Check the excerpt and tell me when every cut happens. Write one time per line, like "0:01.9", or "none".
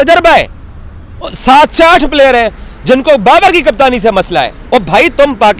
0:01.3

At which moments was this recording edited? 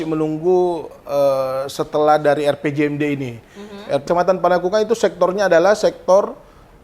0:04.0

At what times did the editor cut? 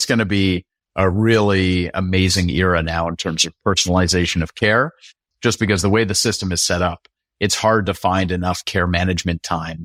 none

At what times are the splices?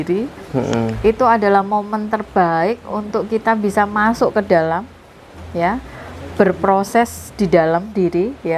none

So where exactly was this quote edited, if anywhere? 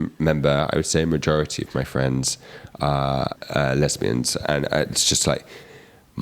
0:03.3

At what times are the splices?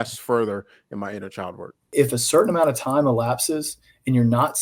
0:01.9

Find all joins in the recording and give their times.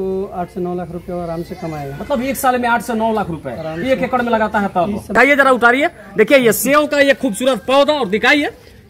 0:05.1

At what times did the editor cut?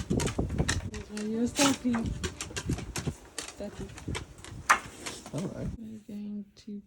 0:00.9
0:05.7

